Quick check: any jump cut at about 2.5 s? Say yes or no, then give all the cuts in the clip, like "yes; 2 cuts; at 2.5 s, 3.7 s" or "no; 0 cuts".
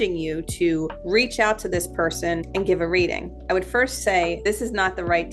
yes; 3 cuts; at 1.0 s, 2.5 s, 4.4 s